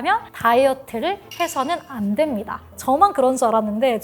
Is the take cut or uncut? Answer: cut